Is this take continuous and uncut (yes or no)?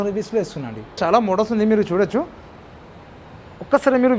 no